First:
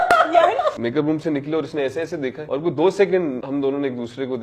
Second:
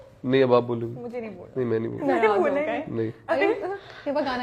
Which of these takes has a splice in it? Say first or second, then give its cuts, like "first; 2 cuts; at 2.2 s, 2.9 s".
first; 3 cuts; at 0.8 s, 2.4 s, 3.4 s